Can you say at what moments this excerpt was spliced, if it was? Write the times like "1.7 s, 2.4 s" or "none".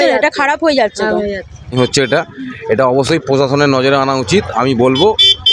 1.6 s